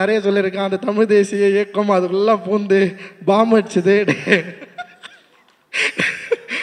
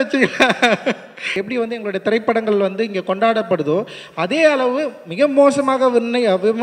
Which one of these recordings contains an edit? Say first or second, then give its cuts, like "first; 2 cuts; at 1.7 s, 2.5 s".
second; 1 cut; at 1.4 s